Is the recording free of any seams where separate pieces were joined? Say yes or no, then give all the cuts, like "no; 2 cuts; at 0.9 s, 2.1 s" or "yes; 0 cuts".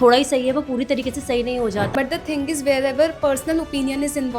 no; 1 cut; at 1.9 s